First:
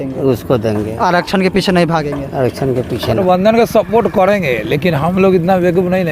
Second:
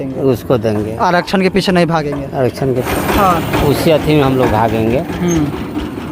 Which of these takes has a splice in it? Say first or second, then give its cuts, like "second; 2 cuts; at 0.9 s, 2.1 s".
first; 1 cut; at 3.1 s